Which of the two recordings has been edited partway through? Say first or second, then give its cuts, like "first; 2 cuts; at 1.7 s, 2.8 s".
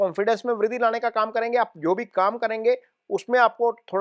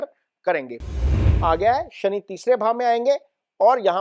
second; 1 cut; at 1.2 s